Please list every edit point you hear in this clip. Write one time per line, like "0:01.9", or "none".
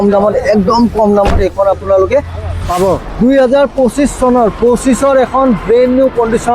0:03.1